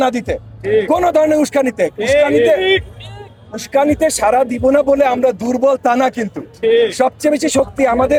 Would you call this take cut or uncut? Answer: uncut